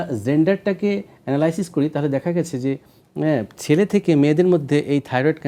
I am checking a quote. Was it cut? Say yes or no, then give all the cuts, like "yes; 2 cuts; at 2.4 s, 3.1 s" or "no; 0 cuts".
no; 0 cuts